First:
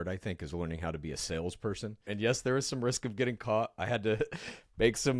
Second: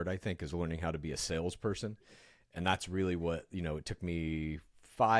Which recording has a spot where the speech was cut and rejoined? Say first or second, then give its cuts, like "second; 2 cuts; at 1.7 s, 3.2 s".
first; 1 cut; at 2.1 s